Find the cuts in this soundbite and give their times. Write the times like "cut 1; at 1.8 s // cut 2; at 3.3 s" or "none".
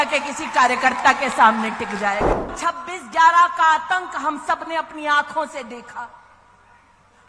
cut 1; at 2.5 s